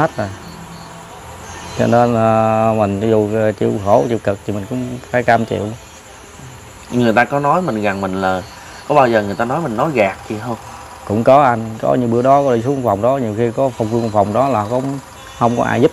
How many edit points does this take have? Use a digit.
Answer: 0